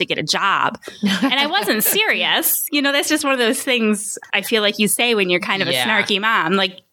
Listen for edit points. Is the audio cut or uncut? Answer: cut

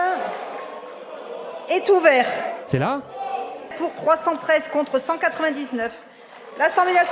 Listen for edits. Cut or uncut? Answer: cut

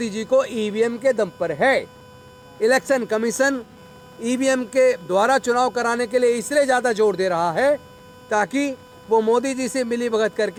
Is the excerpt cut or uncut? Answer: uncut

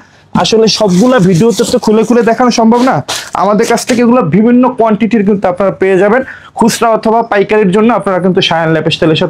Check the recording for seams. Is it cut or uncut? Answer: uncut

